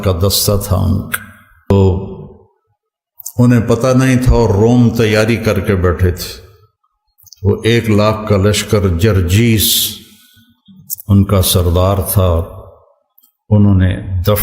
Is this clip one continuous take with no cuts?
no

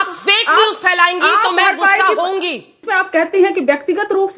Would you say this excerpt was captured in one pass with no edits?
no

